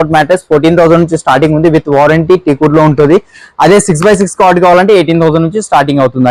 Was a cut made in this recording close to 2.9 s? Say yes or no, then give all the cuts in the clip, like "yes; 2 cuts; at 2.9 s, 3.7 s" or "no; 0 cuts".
no; 0 cuts